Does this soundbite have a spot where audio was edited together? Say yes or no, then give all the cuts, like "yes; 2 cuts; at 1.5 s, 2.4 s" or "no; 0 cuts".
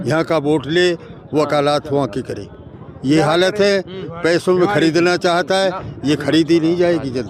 no; 0 cuts